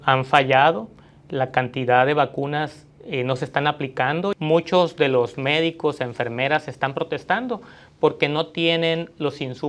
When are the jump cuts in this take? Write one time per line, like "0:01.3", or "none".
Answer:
0:04.3